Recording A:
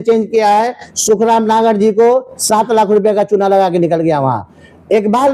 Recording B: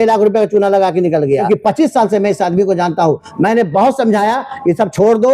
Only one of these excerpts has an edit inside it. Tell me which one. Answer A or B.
B